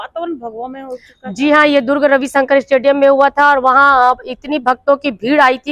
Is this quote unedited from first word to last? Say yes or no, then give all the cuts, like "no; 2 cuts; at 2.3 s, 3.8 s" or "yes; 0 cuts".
yes; 0 cuts